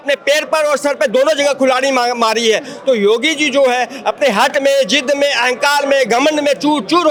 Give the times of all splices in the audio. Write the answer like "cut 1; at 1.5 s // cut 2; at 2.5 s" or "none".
none

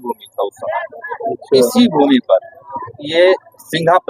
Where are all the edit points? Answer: none

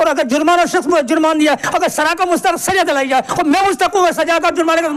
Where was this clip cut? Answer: none

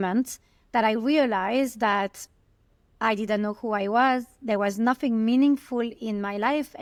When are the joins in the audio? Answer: none

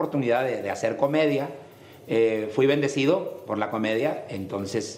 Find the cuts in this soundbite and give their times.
none

